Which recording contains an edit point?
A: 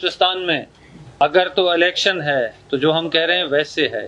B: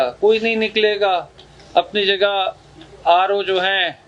A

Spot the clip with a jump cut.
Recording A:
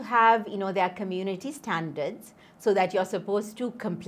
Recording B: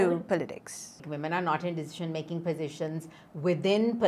B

